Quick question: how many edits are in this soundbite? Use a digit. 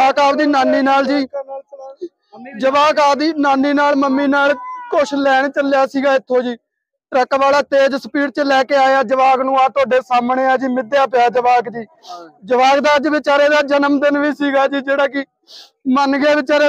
0